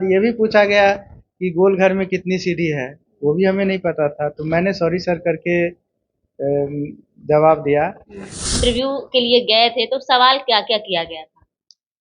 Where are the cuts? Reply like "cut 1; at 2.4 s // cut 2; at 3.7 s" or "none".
cut 1; at 8.5 s